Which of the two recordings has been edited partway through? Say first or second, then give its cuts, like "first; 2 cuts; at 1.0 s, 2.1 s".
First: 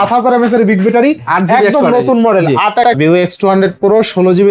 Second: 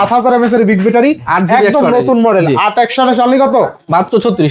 first; 1 cut; at 2.9 s